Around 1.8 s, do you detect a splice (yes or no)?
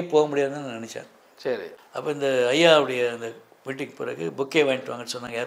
yes